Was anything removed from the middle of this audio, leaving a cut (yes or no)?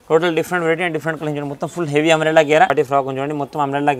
yes